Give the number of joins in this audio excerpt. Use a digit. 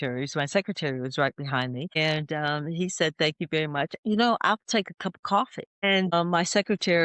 2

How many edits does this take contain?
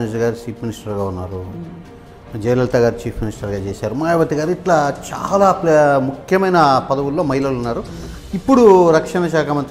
0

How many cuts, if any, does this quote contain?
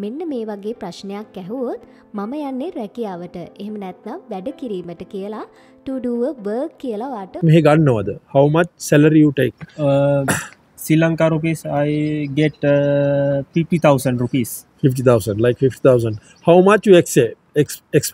1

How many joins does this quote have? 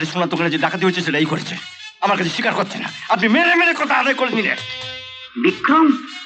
0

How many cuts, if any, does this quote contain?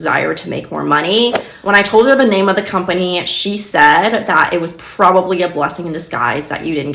1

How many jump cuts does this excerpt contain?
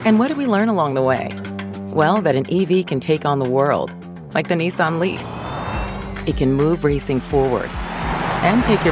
0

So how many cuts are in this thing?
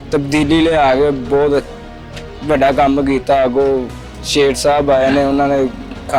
0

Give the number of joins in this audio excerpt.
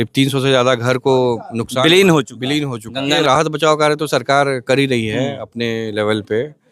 1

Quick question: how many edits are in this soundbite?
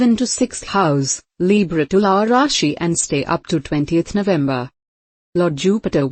1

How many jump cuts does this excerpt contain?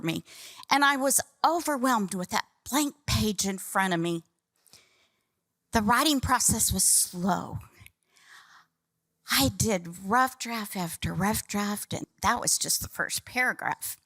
1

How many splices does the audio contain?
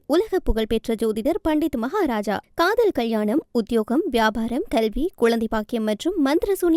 0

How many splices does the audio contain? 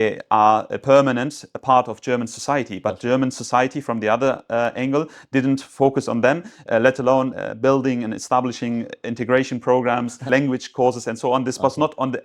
2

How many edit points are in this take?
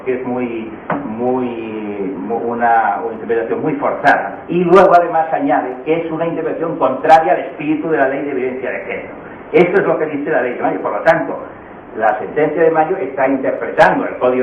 1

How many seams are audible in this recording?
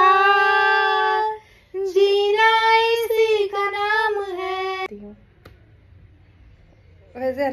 1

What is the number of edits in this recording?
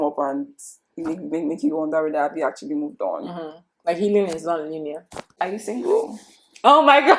1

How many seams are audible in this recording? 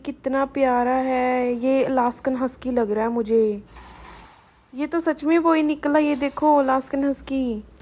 0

